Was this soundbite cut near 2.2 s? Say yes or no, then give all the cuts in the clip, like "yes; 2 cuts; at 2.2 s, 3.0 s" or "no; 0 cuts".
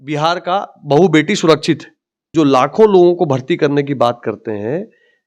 yes; 1 cut; at 2.2 s